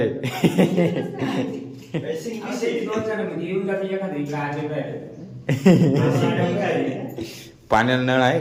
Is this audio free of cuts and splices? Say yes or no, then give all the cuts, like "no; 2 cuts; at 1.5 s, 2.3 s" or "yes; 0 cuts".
yes; 0 cuts